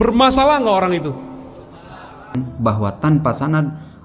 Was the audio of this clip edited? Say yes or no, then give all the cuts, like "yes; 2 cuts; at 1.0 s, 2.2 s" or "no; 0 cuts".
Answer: yes; 1 cut; at 2.4 s